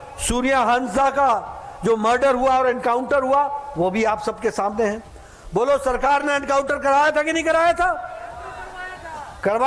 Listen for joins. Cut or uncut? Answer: uncut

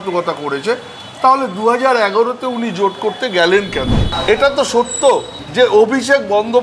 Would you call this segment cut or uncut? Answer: cut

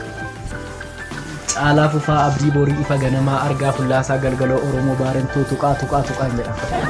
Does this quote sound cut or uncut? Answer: uncut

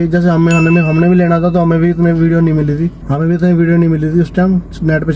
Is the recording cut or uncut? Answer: cut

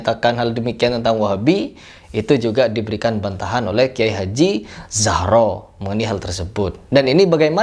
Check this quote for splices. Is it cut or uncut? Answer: uncut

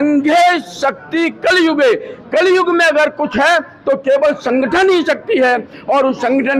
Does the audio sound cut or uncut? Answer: uncut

